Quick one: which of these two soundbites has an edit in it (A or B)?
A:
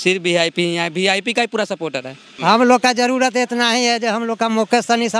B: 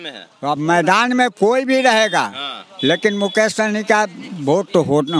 A